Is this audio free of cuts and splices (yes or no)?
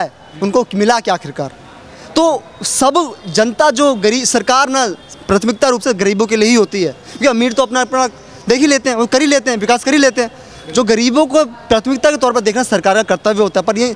yes